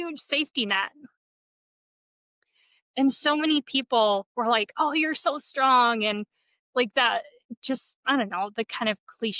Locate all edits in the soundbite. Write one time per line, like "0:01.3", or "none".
none